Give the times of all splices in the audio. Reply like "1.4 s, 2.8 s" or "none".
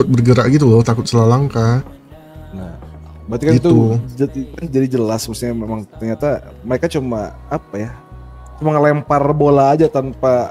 none